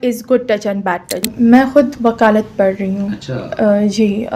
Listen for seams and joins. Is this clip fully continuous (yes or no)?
no